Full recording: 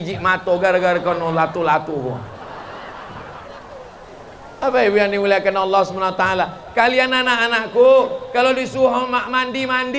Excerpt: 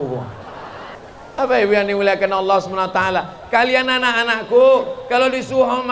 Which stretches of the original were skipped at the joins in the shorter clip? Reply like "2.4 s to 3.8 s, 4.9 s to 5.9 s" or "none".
2.9 s to 4.2 s